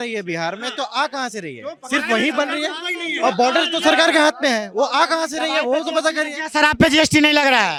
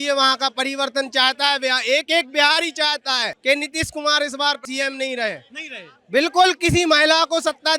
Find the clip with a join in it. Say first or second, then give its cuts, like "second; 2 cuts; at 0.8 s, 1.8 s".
second; 2 cuts; at 3.3 s, 4.6 s